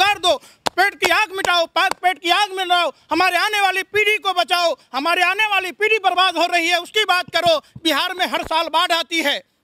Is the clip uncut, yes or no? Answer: yes